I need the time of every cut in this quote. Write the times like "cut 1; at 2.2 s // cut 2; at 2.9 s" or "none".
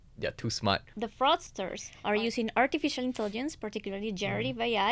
cut 1; at 0.9 s